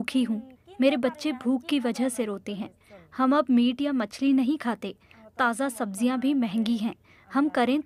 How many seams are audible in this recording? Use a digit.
0